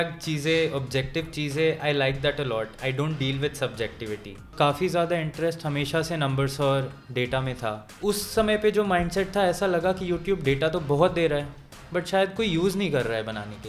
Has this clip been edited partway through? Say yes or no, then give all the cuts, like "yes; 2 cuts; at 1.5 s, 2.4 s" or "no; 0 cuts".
yes; 2 cuts; at 4.5 s, 7.9 s